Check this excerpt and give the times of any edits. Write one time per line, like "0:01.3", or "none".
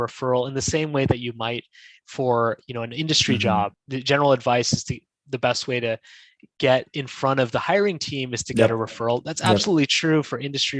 0:03.9